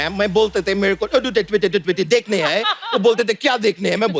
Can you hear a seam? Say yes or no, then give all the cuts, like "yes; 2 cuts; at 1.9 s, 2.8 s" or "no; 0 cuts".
no; 0 cuts